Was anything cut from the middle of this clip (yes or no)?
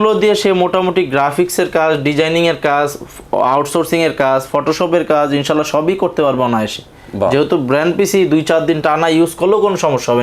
no